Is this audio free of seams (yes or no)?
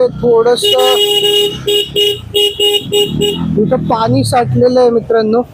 yes